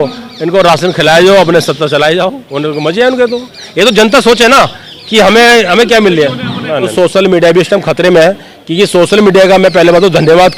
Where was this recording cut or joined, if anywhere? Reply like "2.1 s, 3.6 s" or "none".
6.9 s